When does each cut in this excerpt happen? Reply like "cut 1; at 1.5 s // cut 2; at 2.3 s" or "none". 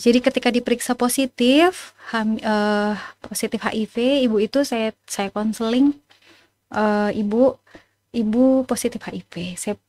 none